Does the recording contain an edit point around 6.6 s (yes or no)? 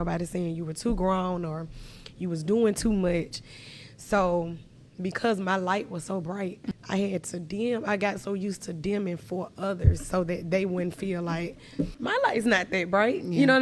yes